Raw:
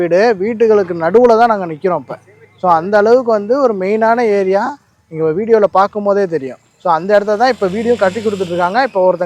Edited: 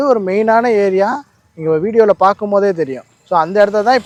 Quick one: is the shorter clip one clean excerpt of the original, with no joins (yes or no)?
yes